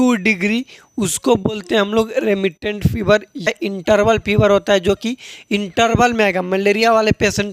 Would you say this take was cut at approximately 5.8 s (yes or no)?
no